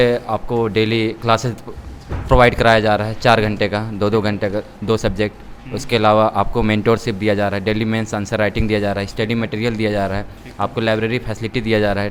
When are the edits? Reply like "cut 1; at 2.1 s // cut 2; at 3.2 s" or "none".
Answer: none